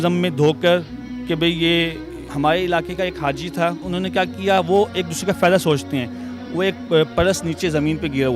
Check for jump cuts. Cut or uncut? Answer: cut